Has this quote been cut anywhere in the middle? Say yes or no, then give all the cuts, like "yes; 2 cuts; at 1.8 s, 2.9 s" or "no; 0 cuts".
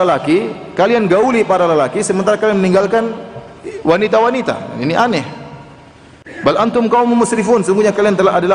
no; 0 cuts